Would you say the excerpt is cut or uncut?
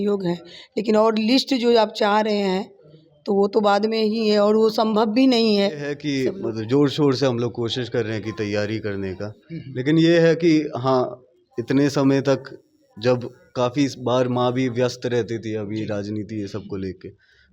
cut